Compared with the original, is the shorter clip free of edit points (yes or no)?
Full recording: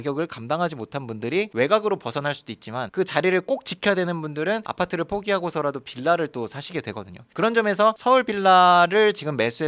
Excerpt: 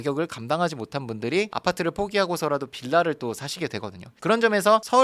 no